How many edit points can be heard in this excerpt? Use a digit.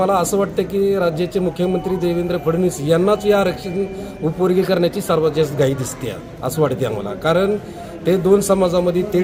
0